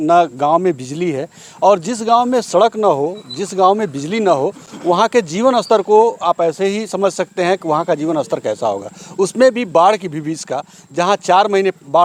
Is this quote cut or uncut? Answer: uncut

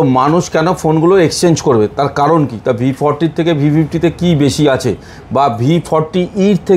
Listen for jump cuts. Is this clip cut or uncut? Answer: uncut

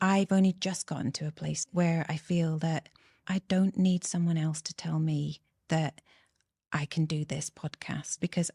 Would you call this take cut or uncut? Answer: uncut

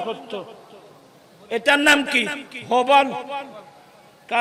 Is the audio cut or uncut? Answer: uncut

